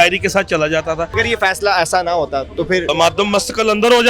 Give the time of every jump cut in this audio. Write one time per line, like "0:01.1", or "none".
0:01.1
0:02.9